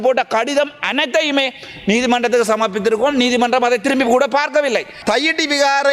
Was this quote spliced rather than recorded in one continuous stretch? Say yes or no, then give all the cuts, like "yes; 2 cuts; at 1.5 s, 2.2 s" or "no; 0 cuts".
yes; 1 cut; at 4.9 s